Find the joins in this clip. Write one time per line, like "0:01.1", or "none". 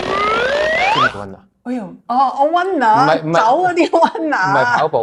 none